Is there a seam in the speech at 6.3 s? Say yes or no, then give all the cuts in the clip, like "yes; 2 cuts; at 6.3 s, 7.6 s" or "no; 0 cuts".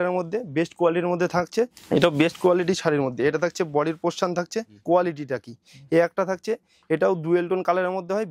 no; 2 cuts; at 1.8 s, 4.7 s